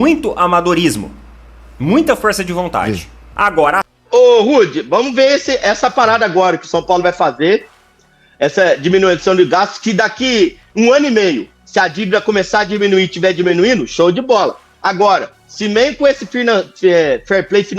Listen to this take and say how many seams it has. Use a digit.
1